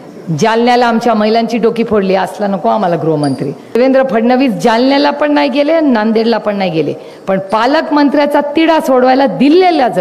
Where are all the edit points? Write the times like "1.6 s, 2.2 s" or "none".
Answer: 3.8 s

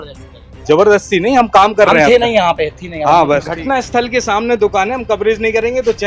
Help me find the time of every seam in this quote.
3.5 s

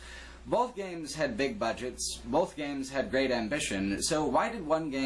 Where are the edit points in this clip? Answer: 1.5 s

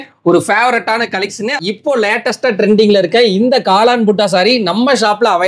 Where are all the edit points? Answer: 1.6 s

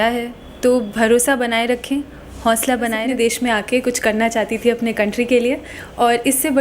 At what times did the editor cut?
3.0 s

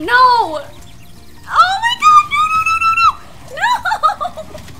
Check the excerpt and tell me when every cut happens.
none

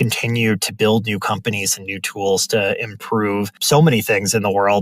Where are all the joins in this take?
3.5 s

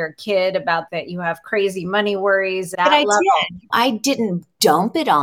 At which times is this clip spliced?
0.9 s, 2.7 s, 3.6 s

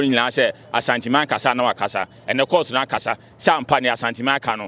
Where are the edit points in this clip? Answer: none

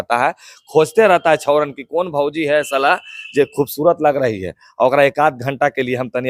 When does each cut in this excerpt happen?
none

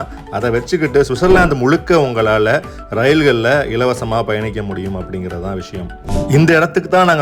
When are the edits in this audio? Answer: 6.1 s

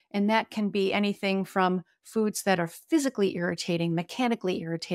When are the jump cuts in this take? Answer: none

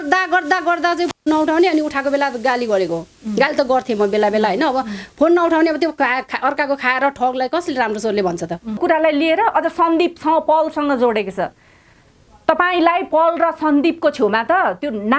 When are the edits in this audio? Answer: 8.8 s

